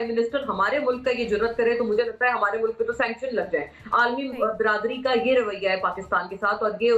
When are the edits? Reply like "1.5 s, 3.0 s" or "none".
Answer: none